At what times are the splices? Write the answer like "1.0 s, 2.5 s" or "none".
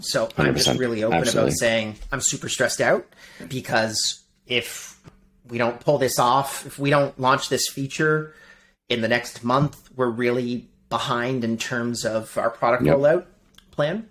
3.4 s, 5.0 s